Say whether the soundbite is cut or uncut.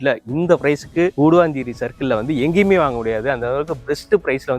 uncut